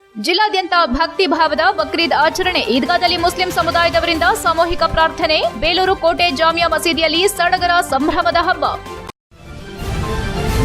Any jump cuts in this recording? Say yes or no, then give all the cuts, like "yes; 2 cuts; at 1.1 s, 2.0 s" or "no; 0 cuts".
yes; 1 cut; at 8.9 s